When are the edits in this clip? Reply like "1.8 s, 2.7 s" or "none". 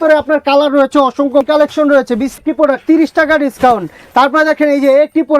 1.4 s, 2.4 s